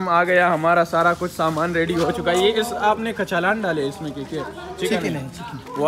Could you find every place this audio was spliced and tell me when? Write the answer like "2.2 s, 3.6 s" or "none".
2.4 s